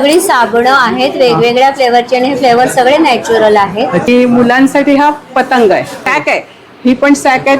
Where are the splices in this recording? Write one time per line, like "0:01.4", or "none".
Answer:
0:04.1
0:06.1